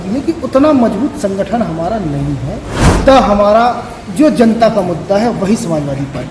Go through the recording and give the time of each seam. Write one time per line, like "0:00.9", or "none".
0:03.0